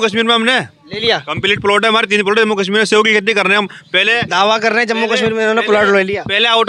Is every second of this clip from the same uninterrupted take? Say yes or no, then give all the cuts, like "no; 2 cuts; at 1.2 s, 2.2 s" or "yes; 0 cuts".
yes; 0 cuts